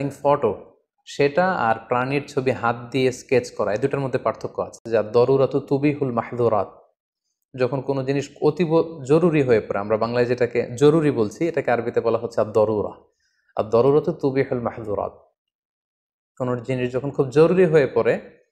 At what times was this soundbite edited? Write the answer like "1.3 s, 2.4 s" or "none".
4.8 s